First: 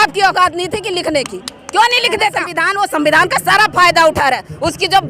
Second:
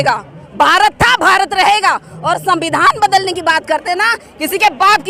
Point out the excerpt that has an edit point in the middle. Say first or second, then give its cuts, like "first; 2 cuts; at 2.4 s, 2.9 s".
first; 1 cut; at 2.6 s